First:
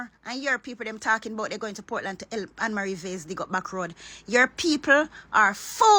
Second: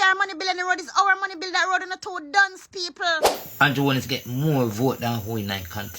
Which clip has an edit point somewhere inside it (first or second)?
second